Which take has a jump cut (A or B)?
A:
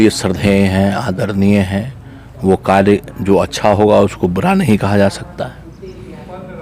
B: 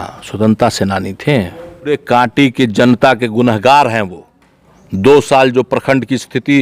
B